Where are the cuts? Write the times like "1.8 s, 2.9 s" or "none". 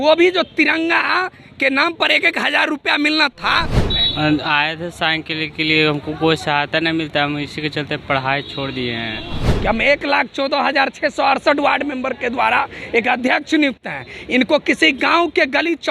3.8 s, 9.5 s